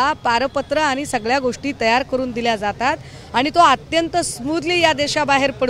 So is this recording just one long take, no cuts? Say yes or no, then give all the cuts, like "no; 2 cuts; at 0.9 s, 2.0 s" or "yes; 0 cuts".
yes; 0 cuts